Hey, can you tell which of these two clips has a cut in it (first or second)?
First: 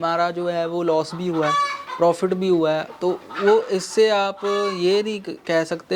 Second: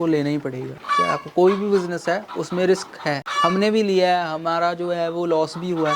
second